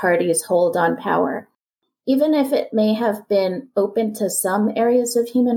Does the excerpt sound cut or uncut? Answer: cut